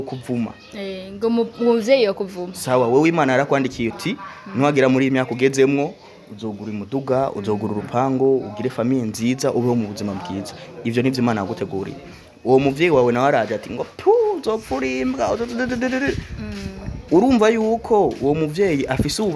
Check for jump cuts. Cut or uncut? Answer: uncut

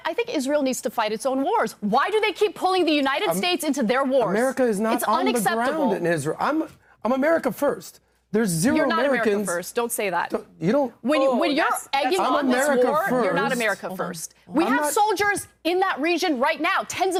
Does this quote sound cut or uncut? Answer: uncut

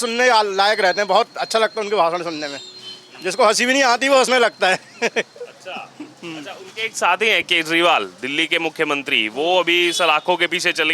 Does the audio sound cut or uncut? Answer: uncut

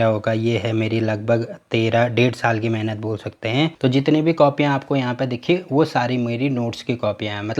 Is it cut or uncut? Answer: uncut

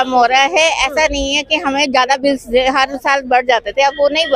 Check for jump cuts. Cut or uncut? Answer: uncut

